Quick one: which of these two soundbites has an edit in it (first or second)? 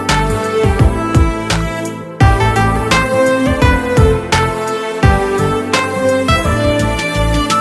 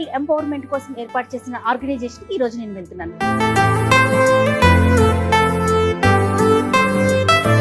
second